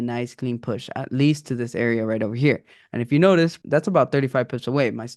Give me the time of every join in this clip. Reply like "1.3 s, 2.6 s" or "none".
3.6 s